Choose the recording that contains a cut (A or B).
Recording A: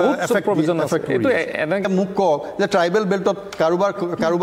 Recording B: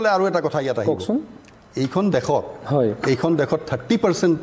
A